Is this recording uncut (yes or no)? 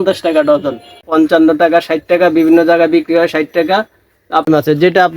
no